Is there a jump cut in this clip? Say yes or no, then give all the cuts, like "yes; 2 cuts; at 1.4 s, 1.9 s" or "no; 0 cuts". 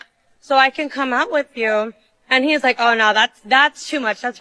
no; 0 cuts